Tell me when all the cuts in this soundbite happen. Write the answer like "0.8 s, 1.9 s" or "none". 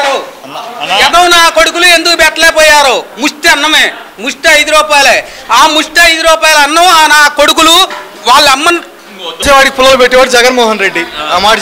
9.4 s